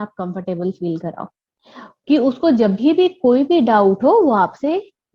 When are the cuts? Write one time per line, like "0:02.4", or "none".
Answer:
none